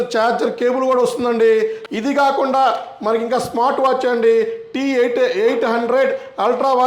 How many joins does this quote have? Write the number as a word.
one